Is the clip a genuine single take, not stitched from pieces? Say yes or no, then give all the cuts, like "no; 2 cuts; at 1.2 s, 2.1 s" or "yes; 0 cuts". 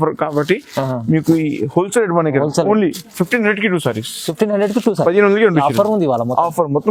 yes; 0 cuts